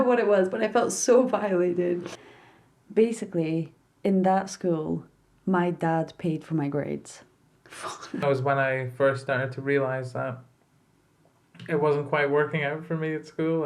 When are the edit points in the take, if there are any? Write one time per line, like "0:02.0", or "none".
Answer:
0:02.1
0:08.2